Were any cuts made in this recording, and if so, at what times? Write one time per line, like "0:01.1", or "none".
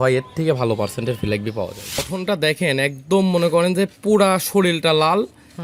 0:02.0